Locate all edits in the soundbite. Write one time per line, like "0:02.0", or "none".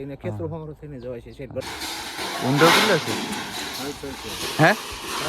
0:01.7